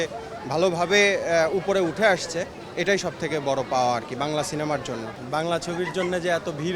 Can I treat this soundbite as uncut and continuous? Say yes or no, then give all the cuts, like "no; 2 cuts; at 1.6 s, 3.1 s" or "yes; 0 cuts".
no; 1 cut; at 5.1 s